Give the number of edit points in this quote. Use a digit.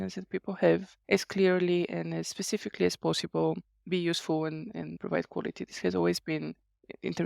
2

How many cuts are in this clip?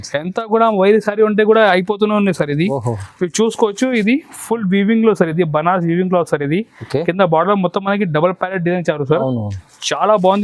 0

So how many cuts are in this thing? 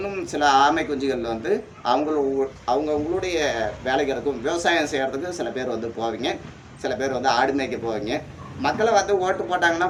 0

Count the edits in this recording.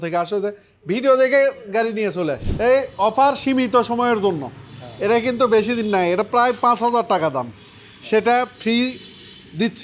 1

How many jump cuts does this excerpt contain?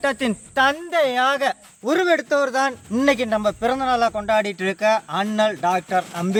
0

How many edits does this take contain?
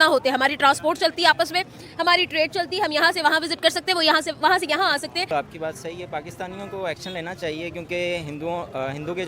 1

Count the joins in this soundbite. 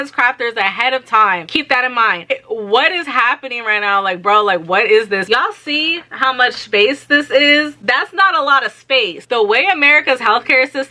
3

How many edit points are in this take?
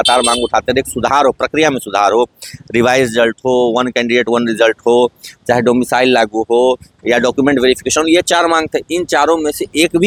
0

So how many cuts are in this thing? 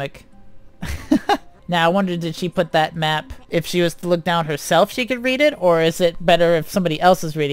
2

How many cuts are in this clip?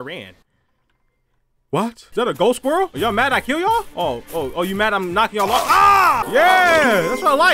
4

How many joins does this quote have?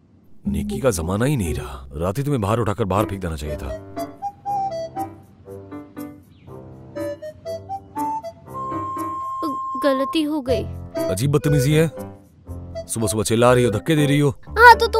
0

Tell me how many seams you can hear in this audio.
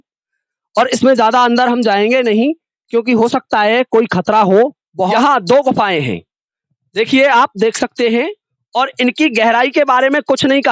1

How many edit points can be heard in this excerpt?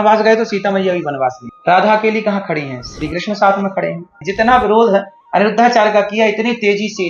2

